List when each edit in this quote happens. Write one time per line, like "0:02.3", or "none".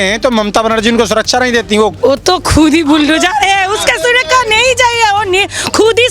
0:02.0

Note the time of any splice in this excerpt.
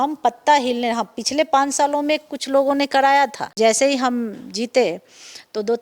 0:03.4

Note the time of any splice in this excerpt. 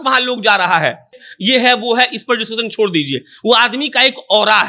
none

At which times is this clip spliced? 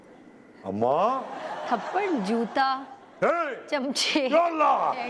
0:01.5

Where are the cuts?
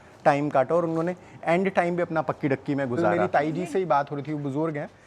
0:03.2

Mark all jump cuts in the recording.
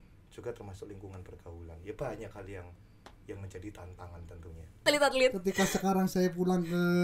0:04.8

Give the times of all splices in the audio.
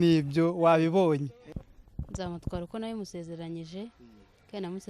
0:01.5

